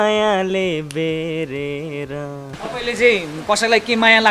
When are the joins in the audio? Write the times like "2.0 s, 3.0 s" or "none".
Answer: 2.6 s